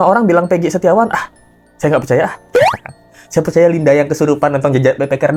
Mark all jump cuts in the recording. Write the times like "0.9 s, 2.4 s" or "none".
none